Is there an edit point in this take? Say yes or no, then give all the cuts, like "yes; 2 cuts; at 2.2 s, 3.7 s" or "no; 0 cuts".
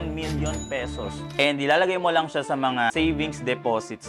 yes; 1 cut; at 2.9 s